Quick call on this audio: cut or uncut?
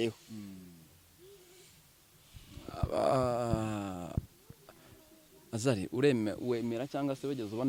uncut